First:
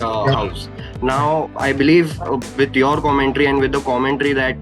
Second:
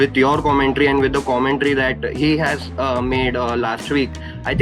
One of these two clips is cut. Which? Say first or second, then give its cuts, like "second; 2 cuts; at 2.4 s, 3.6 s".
first; 1 cut; at 1.5 s